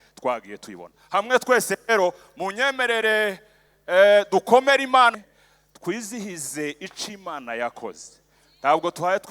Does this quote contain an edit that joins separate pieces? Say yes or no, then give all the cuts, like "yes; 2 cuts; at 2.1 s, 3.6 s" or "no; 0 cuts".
yes; 1 cut; at 5.1 s